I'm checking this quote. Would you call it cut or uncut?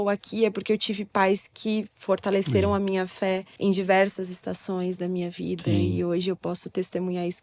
cut